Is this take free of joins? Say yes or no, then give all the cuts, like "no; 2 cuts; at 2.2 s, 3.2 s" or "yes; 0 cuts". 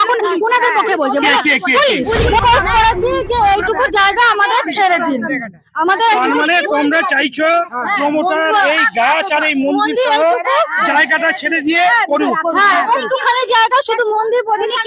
no; 1 cut; at 2.4 s